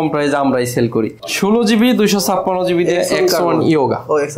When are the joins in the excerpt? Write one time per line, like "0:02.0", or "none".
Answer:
0:01.2